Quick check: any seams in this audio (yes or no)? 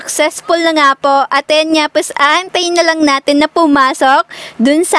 no